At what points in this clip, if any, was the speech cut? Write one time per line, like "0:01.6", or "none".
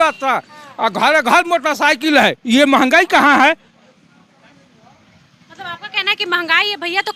none